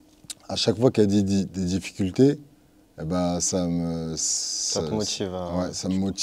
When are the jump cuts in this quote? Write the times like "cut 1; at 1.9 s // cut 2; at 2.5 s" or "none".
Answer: none